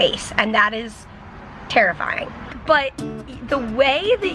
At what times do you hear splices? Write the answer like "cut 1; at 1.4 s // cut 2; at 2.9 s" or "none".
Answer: cut 1; at 2.5 s